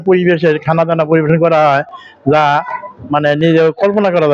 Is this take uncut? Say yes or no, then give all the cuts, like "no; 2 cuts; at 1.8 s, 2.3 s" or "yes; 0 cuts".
yes; 0 cuts